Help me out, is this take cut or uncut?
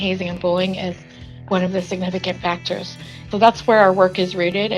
cut